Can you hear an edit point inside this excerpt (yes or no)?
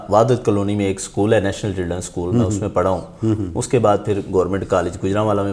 no